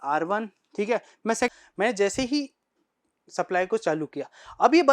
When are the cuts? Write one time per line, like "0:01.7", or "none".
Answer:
0:01.5